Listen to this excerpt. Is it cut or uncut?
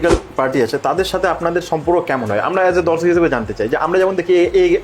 uncut